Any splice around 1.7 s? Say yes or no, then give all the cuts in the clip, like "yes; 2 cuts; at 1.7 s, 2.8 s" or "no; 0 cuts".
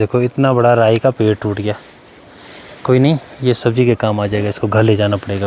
no; 0 cuts